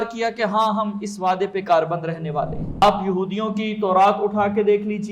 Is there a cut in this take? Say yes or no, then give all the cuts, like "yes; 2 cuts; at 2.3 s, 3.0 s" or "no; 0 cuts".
yes; 1 cut; at 2.8 s